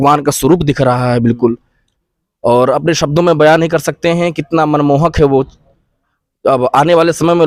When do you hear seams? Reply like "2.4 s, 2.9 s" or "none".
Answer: none

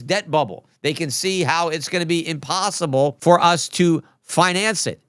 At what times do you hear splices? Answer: 3.2 s

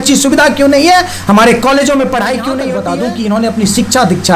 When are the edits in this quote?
2.8 s

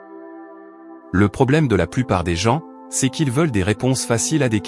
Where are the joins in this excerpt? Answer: 1.1 s

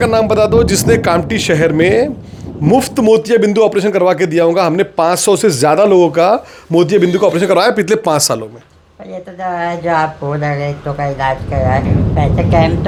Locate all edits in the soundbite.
none

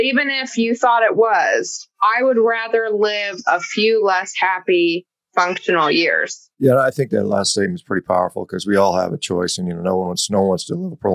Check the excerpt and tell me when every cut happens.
none

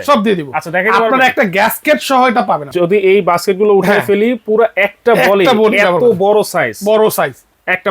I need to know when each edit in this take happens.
2.7 s

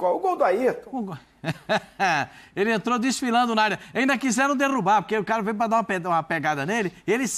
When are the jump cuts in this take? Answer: none

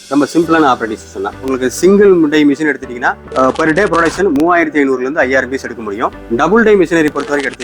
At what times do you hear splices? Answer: 1.4 s

